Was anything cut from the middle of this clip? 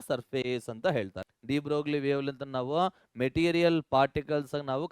yes; 1 cut; at 1.1 s

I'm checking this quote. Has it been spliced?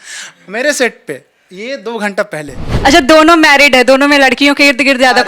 yes; 1 cut; at 2.7 s

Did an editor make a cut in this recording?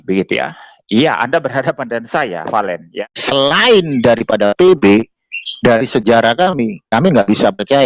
yes; 1 cut; at 3.0 s

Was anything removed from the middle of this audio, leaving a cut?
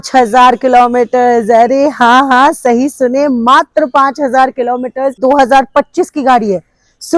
yes; 1 cut; at 5.2 s

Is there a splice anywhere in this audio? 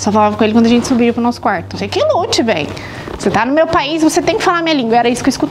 yes; 1 cut; at 1.7 s

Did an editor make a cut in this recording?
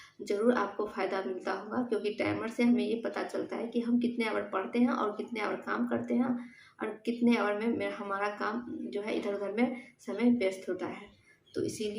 no; 0 cuts

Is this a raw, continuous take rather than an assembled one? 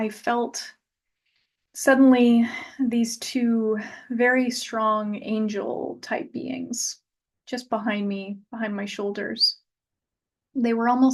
yes; 0 cuts

